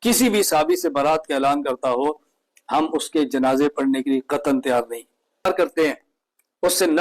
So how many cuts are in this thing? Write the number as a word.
one